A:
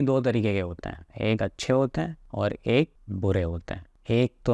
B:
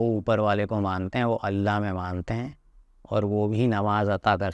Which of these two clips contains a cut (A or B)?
A